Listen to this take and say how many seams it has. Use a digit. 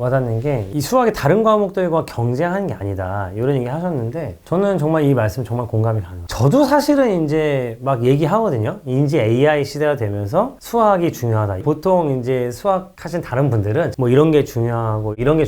3